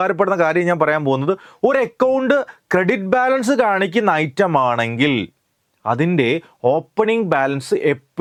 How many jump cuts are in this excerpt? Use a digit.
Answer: 0